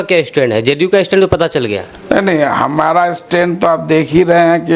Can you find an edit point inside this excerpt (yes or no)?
no